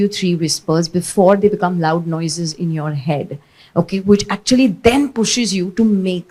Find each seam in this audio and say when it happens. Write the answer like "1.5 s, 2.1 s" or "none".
none